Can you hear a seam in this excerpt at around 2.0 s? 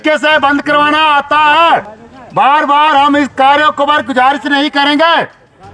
yes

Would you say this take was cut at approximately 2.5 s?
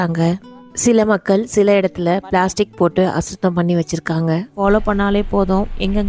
no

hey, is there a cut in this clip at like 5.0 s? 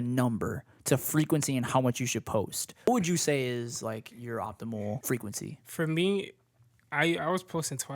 yes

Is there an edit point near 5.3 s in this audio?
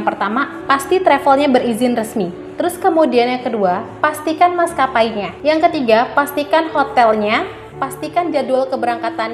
yes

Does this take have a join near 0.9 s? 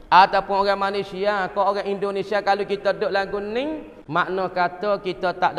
no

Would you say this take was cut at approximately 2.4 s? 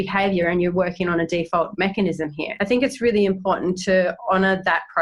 yes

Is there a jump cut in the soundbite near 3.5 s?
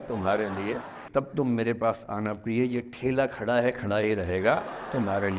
no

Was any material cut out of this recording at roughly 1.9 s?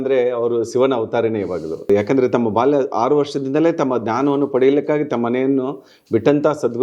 yes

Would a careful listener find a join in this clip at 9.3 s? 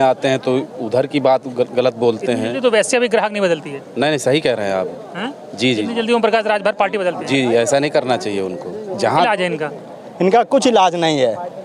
yes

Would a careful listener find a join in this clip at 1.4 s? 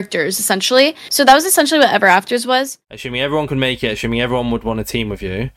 no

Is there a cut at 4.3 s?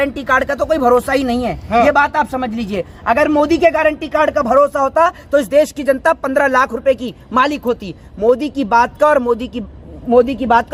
no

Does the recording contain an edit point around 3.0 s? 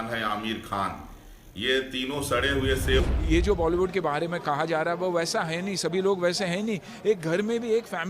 yes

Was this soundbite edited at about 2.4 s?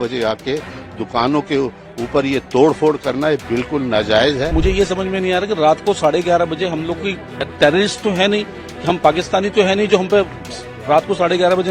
no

